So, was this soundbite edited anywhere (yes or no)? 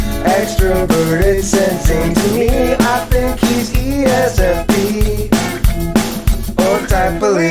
yes